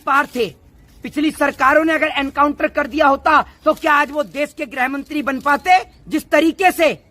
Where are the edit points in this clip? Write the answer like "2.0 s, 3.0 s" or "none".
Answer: 6.0 s